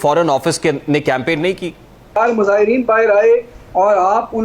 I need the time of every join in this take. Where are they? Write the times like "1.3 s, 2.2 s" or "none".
2.2 s

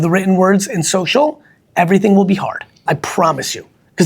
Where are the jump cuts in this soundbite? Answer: 2.8 s

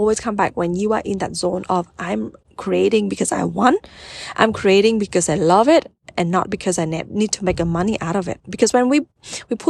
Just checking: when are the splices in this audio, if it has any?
none

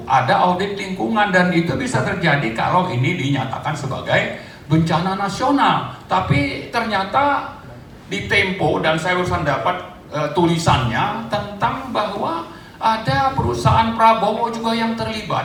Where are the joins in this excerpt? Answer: none

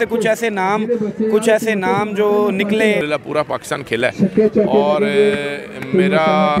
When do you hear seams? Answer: 3.0 s

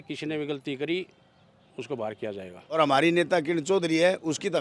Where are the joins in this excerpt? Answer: 2.8 s

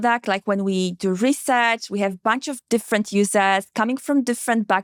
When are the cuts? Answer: none

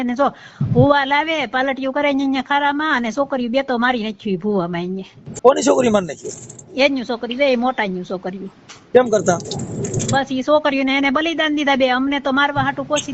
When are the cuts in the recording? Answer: 5.4 s

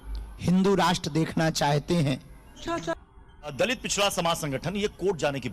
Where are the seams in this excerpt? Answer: 2.9 s

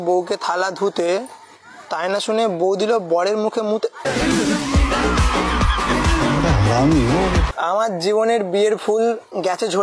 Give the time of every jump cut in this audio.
7.5 s

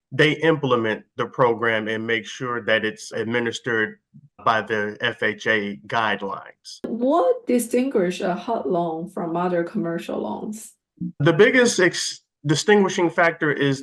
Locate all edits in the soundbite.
6.9 s

